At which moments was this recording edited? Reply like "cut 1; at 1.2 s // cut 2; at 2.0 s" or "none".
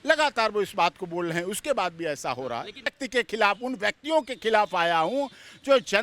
cut 1; at 2.9 s